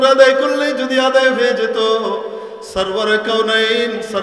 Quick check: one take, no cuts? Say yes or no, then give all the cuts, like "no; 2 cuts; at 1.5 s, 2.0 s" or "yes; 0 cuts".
yes; 0 cuts